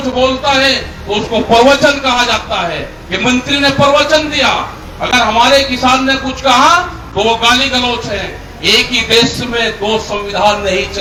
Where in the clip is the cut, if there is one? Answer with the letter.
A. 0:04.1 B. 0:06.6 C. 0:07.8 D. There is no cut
D